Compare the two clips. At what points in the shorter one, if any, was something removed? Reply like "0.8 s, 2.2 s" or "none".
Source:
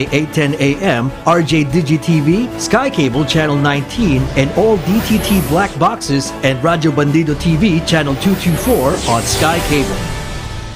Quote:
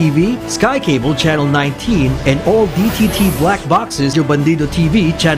4.1 s